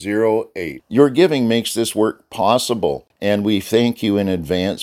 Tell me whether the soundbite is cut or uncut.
cut